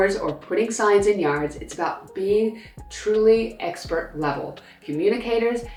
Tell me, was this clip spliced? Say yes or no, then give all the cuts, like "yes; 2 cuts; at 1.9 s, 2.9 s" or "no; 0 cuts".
no; 0 cuts